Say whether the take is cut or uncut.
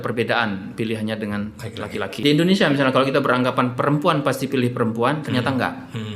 cut